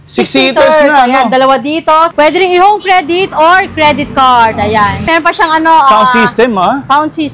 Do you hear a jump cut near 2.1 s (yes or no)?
yes